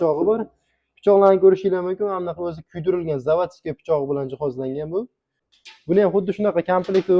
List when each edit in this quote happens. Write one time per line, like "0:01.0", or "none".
0:05.4